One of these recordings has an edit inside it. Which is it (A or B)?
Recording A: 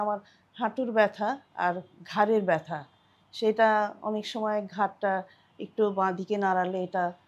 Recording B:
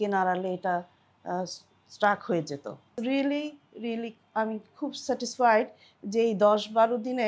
B